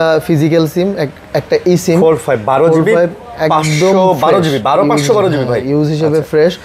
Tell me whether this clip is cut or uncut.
uncut